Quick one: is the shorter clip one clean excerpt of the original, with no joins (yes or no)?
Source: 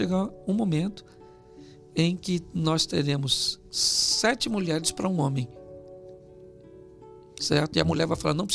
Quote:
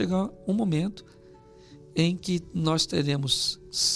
yes